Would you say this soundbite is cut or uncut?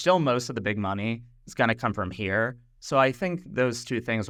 uncut